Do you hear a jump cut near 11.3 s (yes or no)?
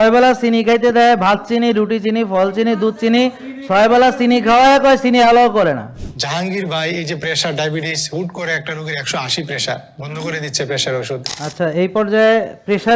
yes